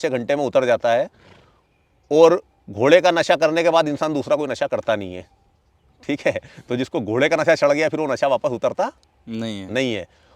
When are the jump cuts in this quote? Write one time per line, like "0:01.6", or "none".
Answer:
none